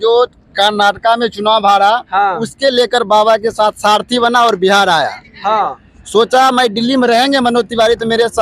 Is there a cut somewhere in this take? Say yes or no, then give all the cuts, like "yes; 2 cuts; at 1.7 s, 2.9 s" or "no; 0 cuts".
no; 0 cuts